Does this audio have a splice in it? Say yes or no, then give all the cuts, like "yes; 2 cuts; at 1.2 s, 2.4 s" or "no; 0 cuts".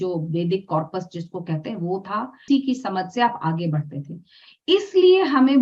yes; 1 cut; at 2.4 s